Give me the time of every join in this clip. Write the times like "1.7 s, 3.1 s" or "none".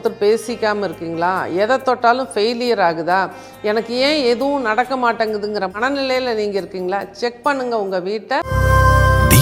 8.5 s